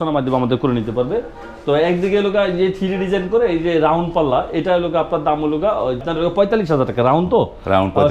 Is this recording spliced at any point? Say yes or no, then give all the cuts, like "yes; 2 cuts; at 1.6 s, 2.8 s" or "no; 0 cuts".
yes; 1 cut; at 6.0 s